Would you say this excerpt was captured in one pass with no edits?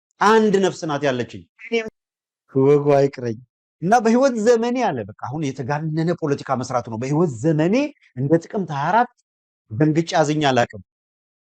no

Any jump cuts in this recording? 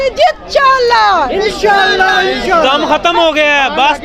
no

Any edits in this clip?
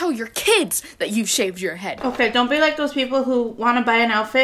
yes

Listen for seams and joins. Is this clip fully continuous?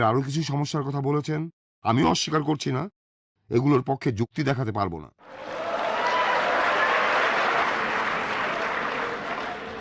no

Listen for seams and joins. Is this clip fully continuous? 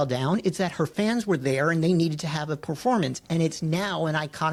yes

